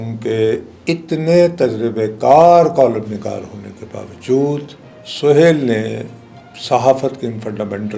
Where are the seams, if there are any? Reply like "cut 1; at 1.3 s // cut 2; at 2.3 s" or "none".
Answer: none